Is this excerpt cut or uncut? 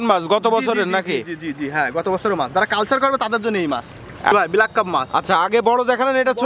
cut